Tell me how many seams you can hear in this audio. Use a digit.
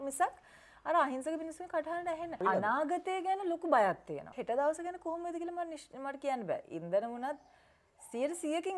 2